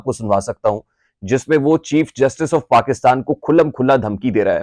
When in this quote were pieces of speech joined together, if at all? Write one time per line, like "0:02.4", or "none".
none